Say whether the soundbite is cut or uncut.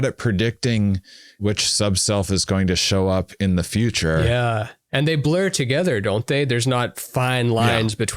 cut